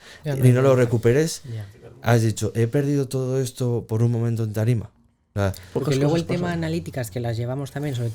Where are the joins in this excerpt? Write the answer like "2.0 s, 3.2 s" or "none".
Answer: 5.2 s